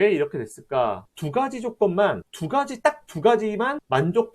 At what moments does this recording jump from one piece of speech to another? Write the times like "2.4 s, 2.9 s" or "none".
1.1 s